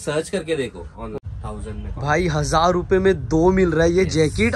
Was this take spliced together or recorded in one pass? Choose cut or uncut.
cut